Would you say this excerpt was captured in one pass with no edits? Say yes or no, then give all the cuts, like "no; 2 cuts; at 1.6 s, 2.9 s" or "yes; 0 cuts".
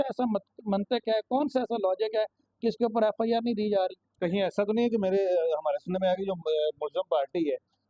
yes; 0 cuts